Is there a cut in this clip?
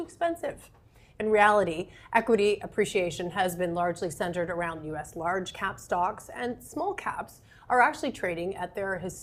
no; 0 cuts

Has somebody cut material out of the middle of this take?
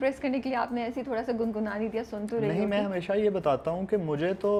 no; 0 cuts

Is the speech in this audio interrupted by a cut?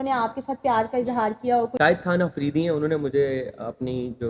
yes; 1 cut; at 1.7 s

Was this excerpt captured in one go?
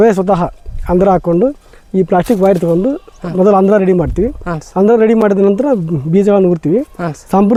yes; 0 cuts

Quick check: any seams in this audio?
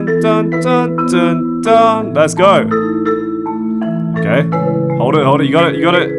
no; 0 cuts

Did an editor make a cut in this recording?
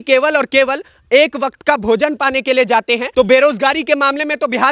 yes; 1 cut; at 3.0 s

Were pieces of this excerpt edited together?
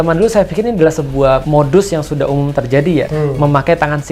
yes; 2 cuts; at 1.4 s, 3.1 s

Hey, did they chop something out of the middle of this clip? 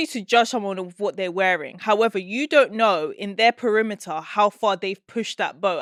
no; 0 cuts

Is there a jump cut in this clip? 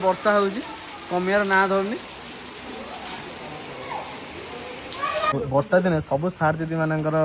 yes; 1 cut; at 5.3 s

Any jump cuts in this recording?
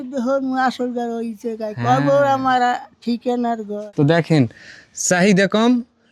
yes; 1 cut; at 3.8 s

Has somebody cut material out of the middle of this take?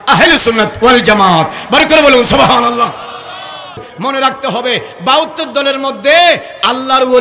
yes; 1 cut; at 3.8 s

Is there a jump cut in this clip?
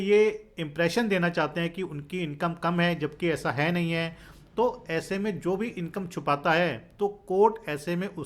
no; 0 cuts

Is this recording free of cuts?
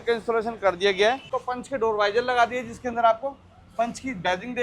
no; 1 cut; at 1.3 s

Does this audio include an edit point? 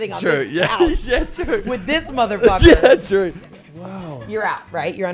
yes; 1 cut; at 3.4 s

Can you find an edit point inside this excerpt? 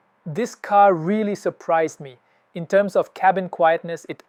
no; 0 cuts

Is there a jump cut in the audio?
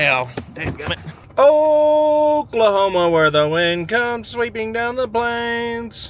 yes; 1 cut; at 1.1 s

